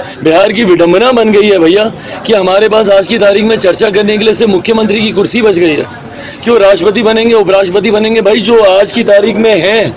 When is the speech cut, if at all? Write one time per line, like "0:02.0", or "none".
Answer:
none